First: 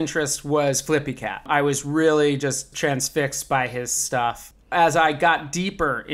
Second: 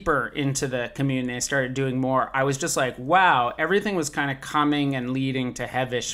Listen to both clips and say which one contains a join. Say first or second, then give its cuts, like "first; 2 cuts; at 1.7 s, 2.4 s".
first; 3 cuts; at 1.5 s, 2.7 s, 4.2 s